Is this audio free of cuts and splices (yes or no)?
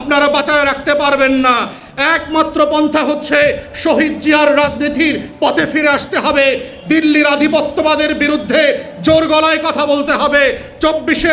yes